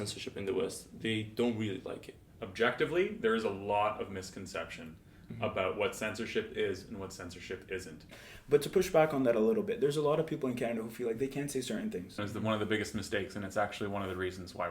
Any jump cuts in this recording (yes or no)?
yes